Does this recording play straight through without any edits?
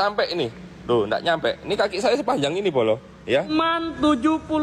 no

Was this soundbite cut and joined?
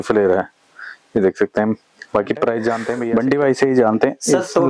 yes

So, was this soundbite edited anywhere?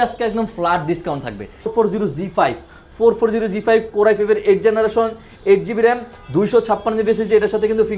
yes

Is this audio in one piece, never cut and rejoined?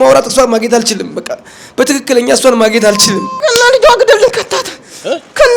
no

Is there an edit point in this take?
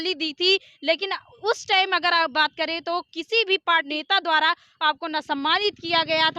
yes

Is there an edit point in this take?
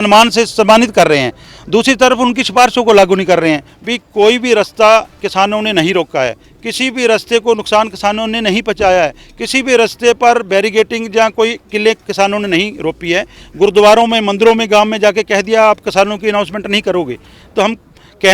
yes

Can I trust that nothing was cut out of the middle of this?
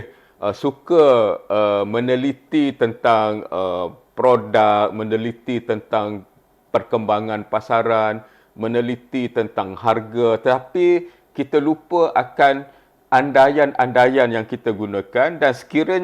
yes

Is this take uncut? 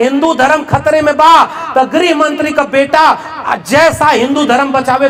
yes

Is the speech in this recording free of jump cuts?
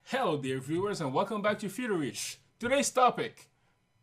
no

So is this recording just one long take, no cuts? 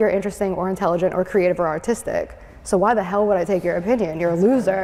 yes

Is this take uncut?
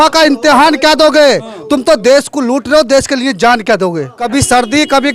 no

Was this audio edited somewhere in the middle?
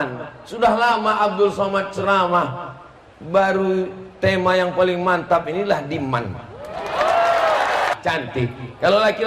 yes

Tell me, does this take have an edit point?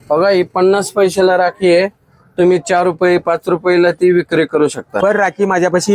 yes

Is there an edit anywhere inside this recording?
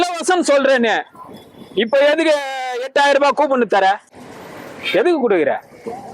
no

